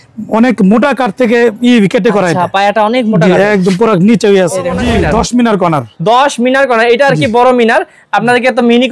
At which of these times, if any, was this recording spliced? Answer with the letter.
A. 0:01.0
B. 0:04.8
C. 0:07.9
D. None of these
B